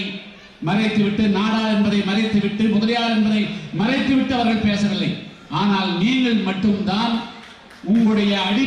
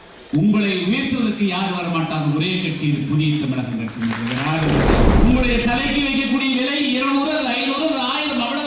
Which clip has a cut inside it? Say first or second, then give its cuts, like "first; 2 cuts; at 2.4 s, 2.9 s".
second; 1 cut; at 5.1 s